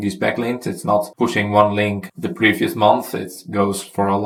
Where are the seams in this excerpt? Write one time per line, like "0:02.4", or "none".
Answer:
none